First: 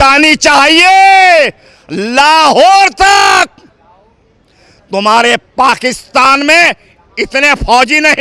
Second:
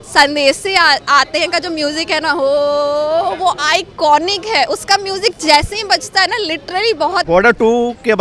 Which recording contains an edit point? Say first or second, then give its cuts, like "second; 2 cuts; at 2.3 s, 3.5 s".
second; 1 cut; at 7.2 s